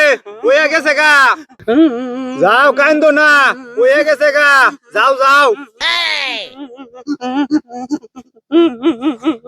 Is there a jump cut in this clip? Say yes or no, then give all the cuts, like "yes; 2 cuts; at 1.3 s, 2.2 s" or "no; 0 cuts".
no; 0 cuts